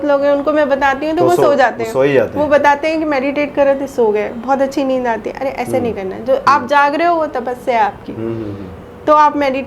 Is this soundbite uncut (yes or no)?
yes